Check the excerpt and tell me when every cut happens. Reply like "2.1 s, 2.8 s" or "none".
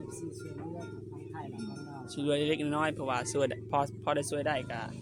none